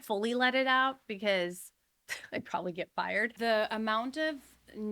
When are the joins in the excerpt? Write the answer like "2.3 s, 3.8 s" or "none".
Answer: 3.3 s